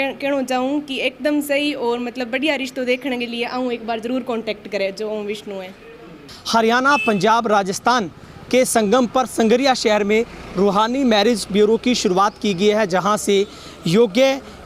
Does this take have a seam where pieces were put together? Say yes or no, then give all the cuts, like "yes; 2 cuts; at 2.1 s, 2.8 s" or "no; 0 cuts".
yes; 1 cut; at 6.3 s